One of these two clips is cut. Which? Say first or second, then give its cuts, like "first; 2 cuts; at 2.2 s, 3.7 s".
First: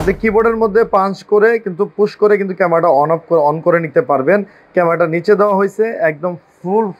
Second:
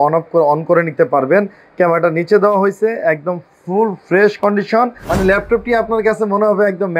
second; 1 cut; at 5.0 s